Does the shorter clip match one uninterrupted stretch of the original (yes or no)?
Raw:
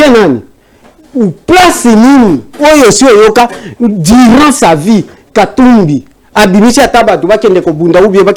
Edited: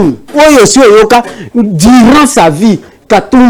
yes